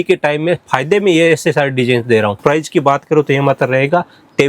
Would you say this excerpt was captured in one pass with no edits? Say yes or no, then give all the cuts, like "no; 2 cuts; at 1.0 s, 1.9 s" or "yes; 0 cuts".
no; 1 cut; at 2.4 s